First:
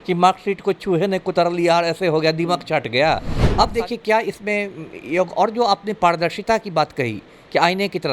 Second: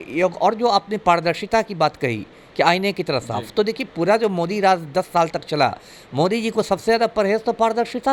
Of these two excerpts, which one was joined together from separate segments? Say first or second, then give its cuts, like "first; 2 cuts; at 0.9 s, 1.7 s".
first; 1 cut; at 3.4 s